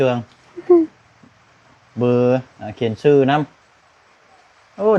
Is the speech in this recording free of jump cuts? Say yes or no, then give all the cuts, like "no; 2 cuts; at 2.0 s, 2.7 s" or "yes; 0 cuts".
yes; 0 cuts